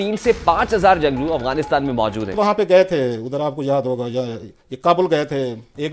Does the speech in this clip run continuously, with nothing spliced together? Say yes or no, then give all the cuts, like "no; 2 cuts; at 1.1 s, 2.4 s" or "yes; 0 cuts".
no; 1 cut; at 2.4 s